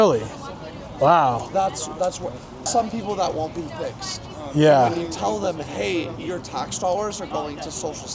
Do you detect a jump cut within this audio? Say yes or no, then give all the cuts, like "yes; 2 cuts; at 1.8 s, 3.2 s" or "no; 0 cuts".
yes; 1 cut; at 2.7 s